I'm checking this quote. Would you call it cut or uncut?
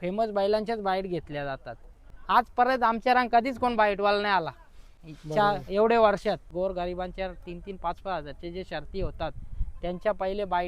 cut